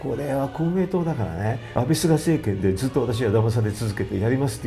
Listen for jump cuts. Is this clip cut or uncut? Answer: cut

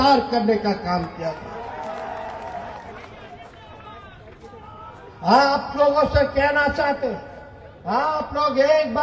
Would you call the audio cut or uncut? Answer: uncut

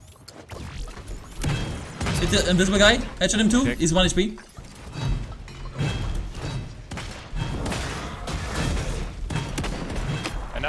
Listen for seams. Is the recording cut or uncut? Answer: uncut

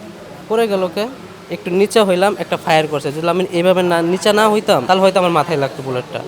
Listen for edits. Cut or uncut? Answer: cut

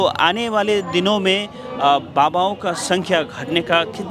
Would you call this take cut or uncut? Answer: uncut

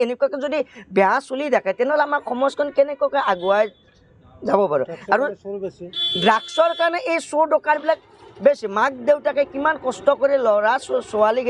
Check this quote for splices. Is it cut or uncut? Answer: uncut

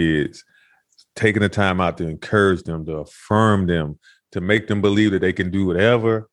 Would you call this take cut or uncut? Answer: uncut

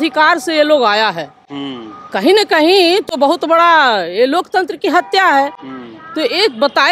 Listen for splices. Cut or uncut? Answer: uncut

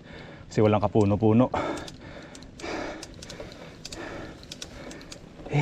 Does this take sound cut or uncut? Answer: uncut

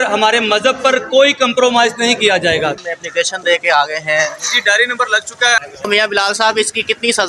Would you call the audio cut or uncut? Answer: cut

